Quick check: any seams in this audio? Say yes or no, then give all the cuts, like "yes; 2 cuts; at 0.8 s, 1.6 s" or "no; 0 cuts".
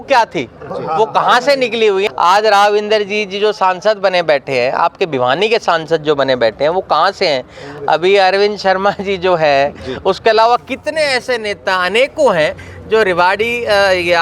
yes; 1 cut; at 2.1 s